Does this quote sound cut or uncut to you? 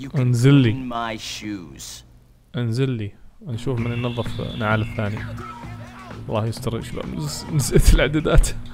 uncut